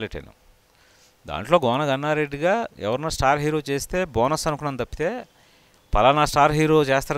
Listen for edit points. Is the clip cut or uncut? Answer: uncut